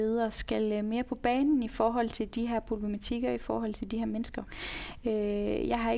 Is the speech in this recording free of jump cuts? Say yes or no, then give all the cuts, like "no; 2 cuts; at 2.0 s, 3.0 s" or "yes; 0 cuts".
no; 1 cut; at 4.5 s